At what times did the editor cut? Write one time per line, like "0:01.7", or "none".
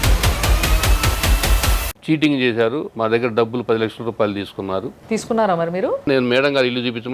0:01.9
0:06.0

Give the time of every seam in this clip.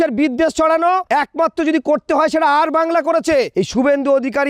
0:01.0
0:03.5

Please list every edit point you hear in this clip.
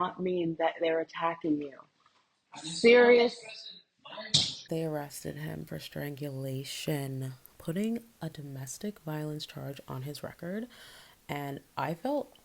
0:04.6

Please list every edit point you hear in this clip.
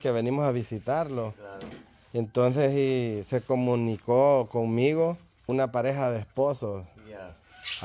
0:05.5

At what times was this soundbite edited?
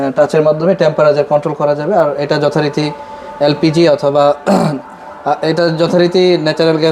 none

